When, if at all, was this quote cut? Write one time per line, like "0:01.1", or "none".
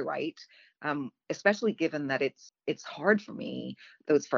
0:02.5